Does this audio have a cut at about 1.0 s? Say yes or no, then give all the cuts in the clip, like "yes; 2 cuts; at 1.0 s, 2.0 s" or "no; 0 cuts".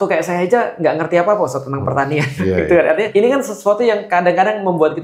no; 2 cuts; at 2.3 s, 3.1 s